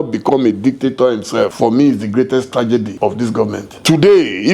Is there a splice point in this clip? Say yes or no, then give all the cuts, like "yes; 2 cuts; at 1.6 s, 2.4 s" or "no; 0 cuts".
yes; 2 cuts; at 1.5 s, 3.4 s